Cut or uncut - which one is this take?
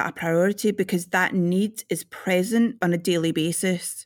cut